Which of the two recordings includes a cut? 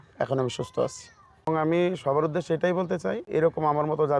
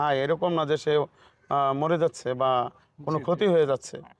first; 2 cuts; at 1.5 s, 3.2 s

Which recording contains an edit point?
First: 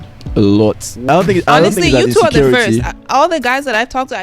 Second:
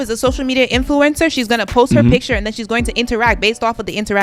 first; 1 cut; at 1.0 s

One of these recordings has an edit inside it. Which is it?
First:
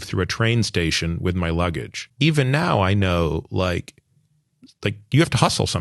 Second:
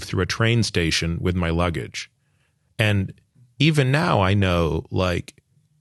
first; 1 cut; at 2.0 s

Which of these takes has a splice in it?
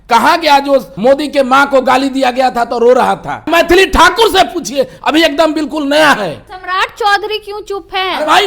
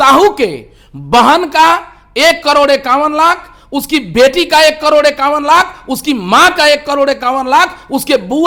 first; 3 cuts; at 0.9 s, 3.5 s, 6.4 s

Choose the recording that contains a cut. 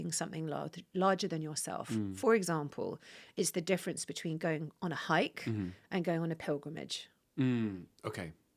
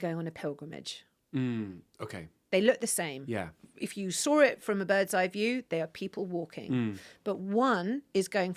second; 1 cut; at 3.6 s

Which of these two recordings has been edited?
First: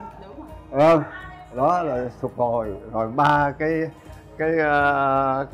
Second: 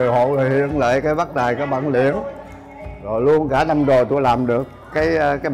second; 1 cut; at 2.6 s

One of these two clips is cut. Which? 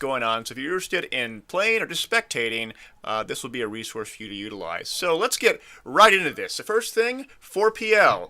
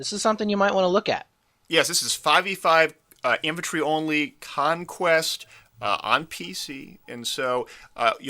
first; 1 cut; at 6.9 s

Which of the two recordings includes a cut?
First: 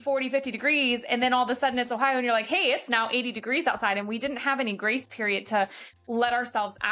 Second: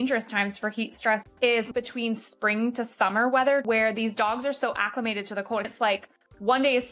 second; 3 cuts; at 1.7 s, 3.7 s, 5.7 s

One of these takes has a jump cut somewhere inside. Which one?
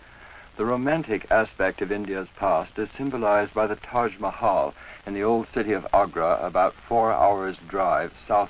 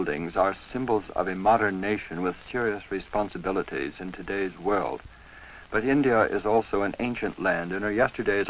first; 1 cut; at 0.9 s

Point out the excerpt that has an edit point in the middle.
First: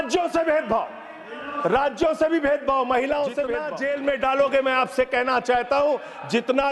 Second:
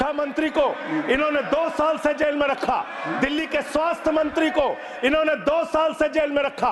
first; 1 cut; at 3.7 s

